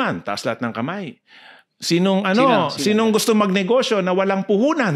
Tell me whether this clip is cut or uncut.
uncut